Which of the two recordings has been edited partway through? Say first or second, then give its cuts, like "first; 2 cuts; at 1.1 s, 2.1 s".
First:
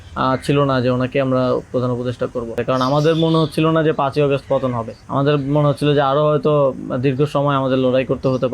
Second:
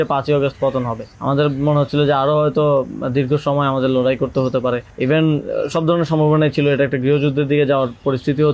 first; 1 cut; at 2.6 s